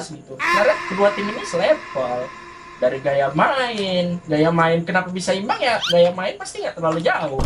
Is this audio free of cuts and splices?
yes; 0 cuts

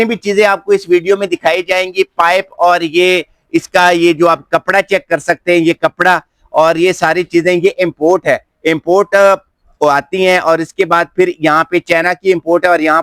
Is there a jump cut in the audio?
no; 0 cuts

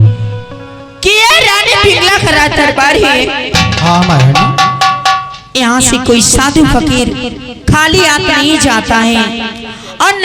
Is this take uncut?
yes; 0 cuts

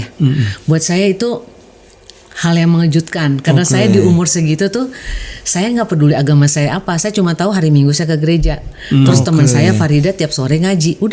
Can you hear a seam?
no; 0 cuts

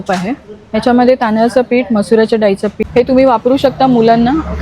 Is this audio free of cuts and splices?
no; 1 cut; at 2.8 s

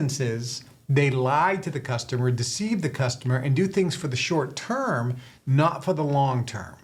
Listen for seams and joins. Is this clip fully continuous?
yes; 0 cuts

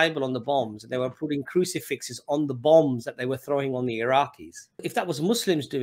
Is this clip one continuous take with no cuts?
no; 1 cut; at 4.9 s

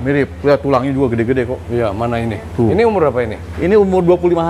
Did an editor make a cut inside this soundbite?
no; 0 cuts

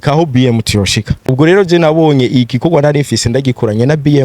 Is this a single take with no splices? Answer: no; 1 cut; at 1.2 s

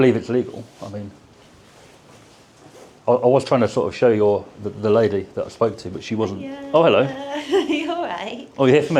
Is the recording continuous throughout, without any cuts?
yes; 0 cuts

